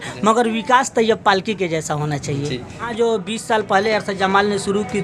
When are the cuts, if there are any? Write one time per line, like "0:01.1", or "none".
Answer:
0:02.9